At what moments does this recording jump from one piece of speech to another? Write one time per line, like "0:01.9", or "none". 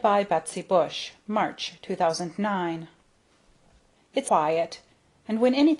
none